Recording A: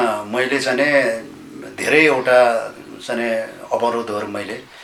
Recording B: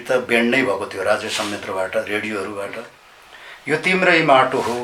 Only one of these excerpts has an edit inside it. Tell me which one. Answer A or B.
B